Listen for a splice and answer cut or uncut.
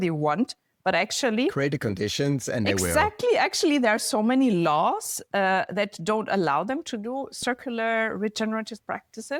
uncut